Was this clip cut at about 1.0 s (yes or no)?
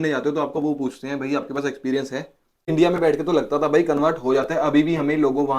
no